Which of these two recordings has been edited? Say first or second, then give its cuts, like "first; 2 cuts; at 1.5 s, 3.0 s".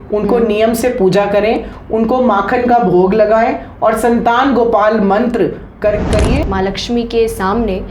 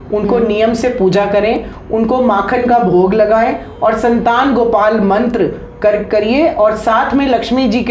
first; 1 cut; at 6.4 s